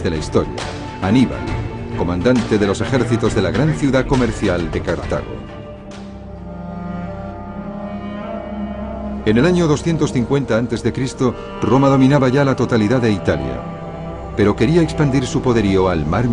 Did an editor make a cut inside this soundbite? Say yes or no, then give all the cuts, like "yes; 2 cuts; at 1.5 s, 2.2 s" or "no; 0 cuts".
yes; 1 cut; at 4.4 s